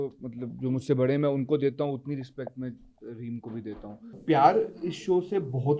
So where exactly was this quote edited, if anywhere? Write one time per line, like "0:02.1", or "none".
0:04.1